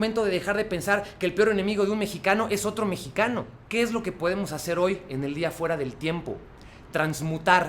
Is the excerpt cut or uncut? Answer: cut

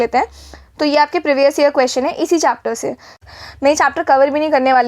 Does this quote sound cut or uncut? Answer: cut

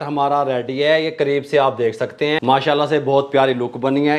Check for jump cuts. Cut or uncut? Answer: cut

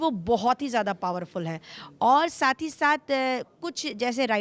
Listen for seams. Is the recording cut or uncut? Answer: uncut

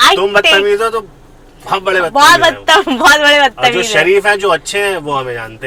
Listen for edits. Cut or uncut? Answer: uncut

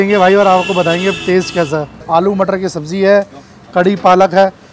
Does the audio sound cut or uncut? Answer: cut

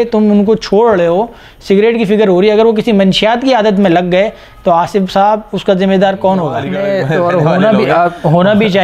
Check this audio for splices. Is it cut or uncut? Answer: cut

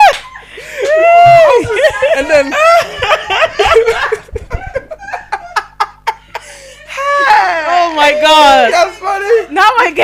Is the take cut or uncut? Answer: uncut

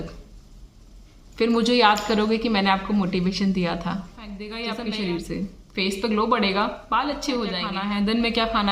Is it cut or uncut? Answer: cut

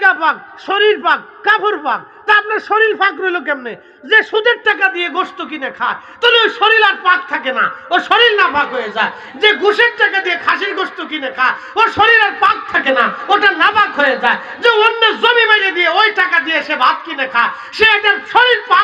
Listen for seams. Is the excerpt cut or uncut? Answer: uncut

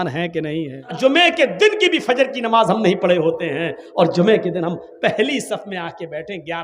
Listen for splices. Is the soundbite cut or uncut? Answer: cut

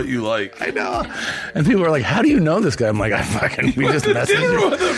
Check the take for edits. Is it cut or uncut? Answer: uncut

